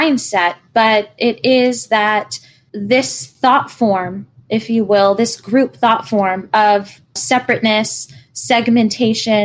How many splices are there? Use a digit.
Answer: 0